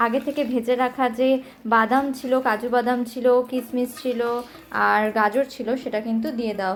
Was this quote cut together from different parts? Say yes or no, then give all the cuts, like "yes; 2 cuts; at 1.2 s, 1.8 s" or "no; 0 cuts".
no; 0 cuts